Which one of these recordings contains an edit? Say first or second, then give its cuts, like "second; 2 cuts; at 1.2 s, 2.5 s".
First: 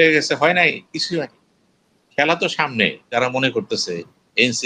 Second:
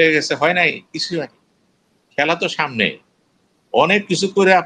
first; 1 cut; at 3.1 s